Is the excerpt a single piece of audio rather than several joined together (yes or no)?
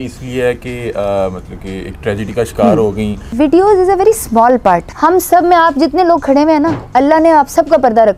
no